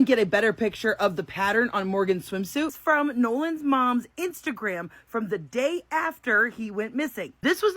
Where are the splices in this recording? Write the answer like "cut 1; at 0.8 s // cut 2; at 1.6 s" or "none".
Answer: cut 1; at 2.7 s